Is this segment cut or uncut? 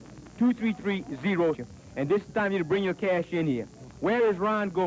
uncut